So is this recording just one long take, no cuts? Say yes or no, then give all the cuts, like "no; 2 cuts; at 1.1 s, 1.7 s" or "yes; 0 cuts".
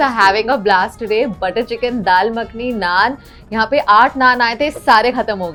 yes; 0 cuts